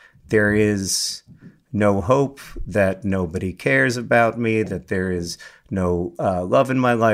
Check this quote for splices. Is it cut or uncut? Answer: uncut